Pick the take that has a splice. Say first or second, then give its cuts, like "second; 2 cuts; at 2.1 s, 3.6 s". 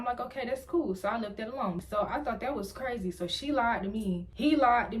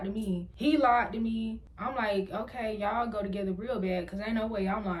first; 1 cut; at 1.8 s